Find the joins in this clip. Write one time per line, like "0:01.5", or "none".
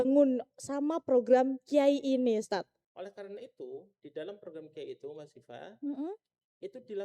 0:02.8